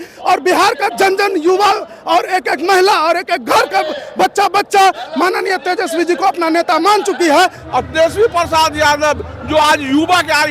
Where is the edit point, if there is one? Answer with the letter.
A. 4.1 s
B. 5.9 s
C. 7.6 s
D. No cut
C